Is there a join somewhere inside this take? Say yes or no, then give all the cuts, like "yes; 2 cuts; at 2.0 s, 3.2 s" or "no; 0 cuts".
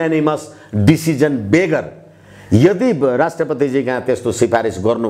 no; 0 cuts